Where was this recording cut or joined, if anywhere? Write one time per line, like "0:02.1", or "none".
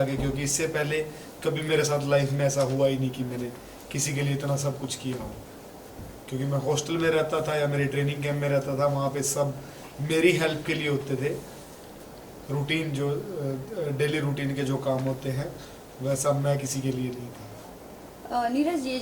none